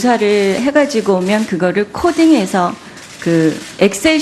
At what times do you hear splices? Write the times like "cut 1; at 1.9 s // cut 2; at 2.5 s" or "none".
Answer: none